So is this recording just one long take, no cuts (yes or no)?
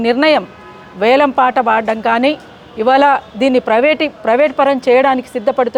yes